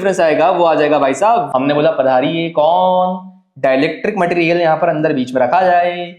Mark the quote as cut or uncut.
cut